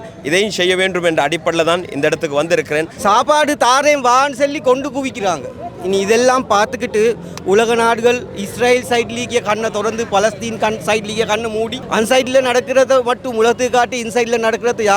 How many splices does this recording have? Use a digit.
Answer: 1